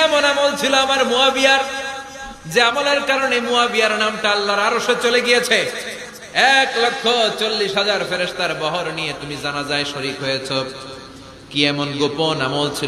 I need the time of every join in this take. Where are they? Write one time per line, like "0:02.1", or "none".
none